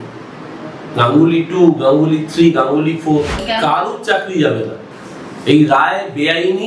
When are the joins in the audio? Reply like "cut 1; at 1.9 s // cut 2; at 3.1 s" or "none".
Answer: cut 1; at 3.4 s